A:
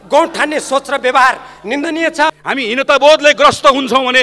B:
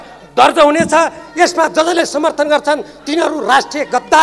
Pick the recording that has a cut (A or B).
A